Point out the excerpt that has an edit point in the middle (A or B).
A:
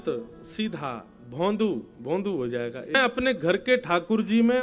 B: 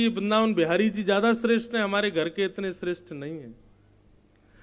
A